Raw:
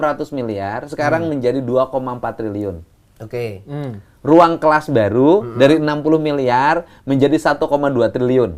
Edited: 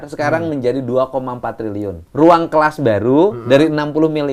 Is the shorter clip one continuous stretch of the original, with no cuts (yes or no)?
no